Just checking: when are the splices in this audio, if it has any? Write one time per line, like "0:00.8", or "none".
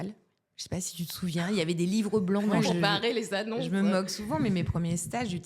0:02.6